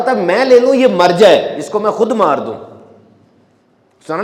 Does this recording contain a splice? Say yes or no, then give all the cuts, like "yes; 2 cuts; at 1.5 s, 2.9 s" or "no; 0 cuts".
no; 0 cuts